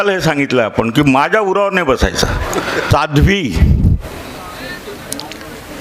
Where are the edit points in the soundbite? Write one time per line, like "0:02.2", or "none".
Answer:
0:02.8